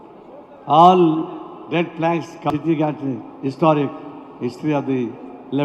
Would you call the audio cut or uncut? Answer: cut